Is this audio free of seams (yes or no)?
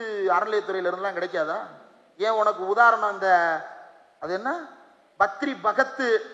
yes